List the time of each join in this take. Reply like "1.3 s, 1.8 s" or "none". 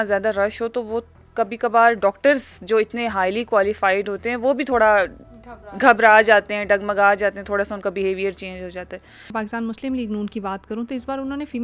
9.3 s